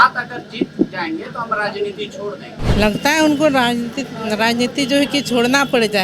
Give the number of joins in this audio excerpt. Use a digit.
1